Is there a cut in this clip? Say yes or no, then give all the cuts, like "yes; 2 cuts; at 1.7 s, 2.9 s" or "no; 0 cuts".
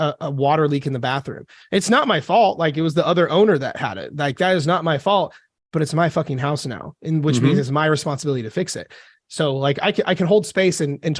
no; 0 cuts